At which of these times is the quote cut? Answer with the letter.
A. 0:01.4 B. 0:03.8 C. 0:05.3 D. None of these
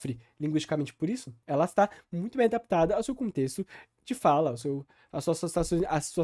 A